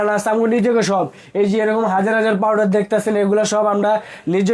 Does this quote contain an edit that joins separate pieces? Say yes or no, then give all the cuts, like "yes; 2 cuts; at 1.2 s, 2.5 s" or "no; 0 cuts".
no; 0 cuts